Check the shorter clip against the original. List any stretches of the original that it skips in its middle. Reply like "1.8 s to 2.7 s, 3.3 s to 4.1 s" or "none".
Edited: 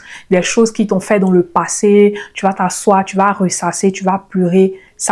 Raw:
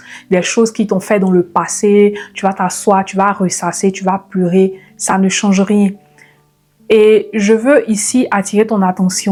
none